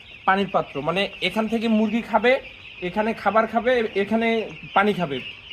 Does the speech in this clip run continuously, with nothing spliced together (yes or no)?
yes